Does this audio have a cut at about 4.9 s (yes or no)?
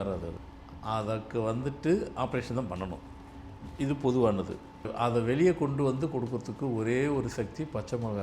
yes